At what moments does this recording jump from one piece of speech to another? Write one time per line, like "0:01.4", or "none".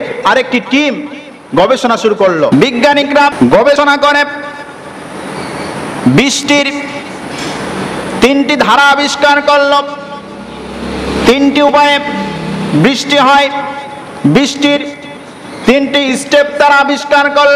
0:02.5
0:03.3